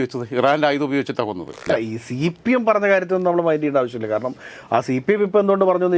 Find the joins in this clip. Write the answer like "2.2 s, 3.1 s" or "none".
1.6 s